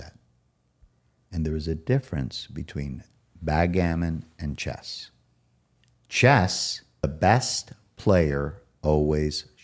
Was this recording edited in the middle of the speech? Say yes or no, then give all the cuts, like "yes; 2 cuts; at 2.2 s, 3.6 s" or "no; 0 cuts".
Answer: yes; 1 cut; at 7.0 s